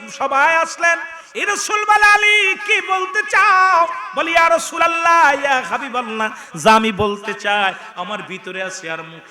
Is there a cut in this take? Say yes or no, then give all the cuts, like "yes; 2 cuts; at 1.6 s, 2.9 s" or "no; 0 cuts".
no; 0 cuts